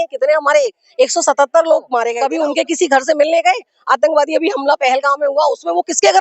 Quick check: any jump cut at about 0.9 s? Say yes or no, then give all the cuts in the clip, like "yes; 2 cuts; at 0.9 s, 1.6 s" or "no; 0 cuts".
no; 1 cut; at 2.2 s